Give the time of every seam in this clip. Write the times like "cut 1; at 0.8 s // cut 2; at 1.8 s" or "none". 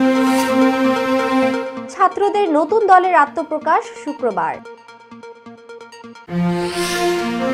none